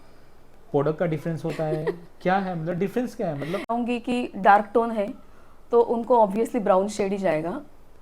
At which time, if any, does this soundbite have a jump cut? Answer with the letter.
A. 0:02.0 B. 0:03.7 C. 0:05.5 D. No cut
B